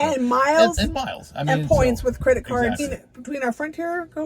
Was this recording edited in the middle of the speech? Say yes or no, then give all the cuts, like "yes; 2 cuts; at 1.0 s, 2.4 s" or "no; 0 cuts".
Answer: yes; 1 cut; at 2.8 s